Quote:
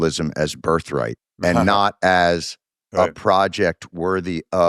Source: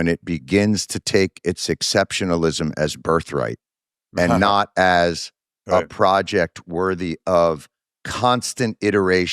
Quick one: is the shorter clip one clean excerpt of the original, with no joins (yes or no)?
no